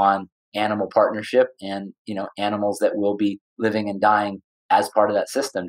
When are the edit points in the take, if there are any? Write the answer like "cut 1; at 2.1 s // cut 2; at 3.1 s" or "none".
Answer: none